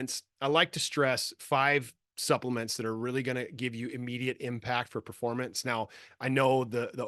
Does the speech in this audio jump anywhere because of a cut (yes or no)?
no